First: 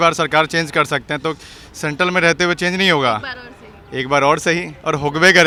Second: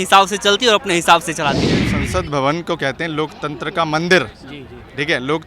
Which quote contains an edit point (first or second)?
second